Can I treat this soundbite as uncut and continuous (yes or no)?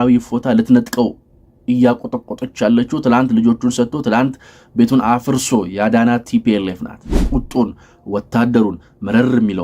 no